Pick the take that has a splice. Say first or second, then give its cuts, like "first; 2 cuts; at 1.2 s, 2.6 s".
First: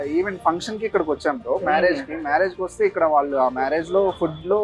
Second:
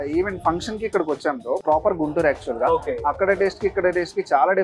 second; 1 cut; at 1.6 s